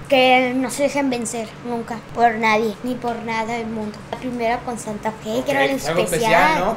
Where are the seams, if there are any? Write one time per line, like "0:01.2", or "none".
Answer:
0:02.0
0:02.8
0:04.2